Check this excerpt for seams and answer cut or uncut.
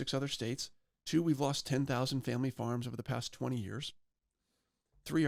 uncut